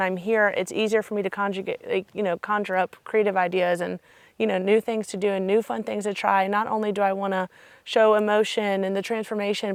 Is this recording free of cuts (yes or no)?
yes